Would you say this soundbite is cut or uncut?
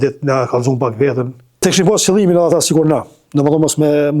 cut